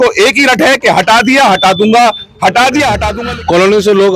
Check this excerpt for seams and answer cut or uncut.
cut